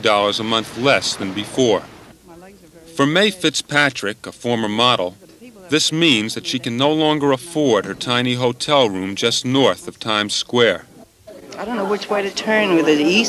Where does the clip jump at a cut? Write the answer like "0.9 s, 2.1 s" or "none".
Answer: 8.3 s